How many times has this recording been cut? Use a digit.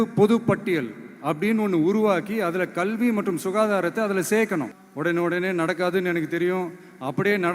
1